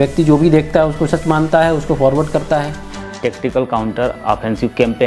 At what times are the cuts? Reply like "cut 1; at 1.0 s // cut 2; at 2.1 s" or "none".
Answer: cut 1; at 3.0 s